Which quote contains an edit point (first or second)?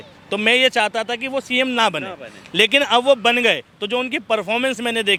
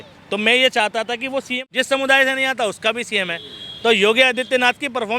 second